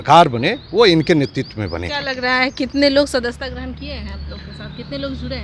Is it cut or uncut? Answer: uncut